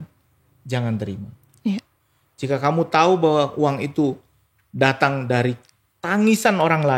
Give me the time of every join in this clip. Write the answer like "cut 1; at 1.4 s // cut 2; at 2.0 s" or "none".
none